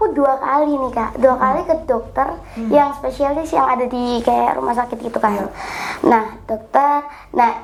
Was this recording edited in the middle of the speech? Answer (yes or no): no